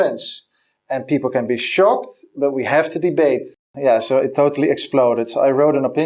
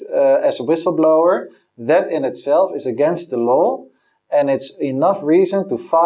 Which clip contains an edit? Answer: first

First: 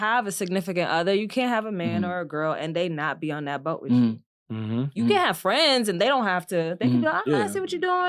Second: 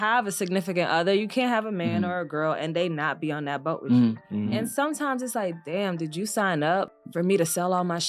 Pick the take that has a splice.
second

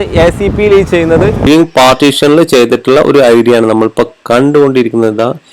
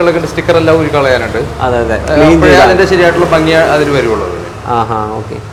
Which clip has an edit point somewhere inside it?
first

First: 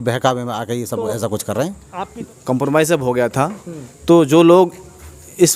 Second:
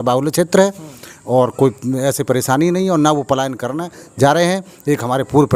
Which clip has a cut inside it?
first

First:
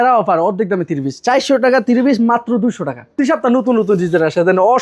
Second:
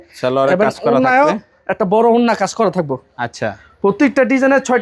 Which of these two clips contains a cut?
first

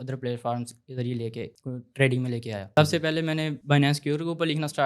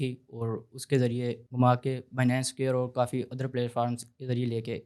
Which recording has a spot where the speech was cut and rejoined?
first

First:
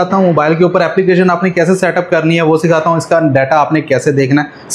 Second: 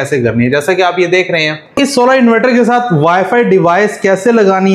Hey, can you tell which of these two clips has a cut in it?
second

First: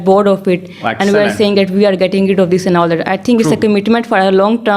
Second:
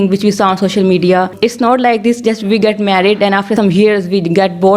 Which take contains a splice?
second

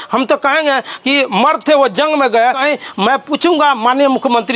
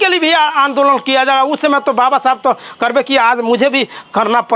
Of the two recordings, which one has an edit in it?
first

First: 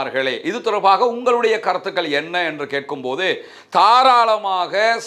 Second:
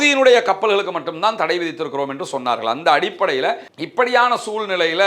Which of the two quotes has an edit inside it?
second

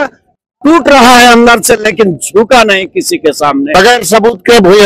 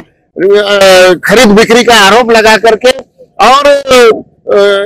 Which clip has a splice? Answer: first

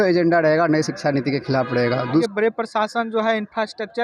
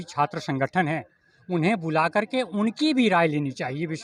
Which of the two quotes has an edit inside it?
first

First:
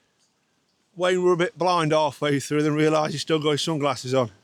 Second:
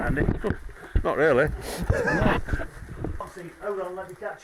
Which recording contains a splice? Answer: second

